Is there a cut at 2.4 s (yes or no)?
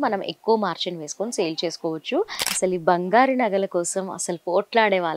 yes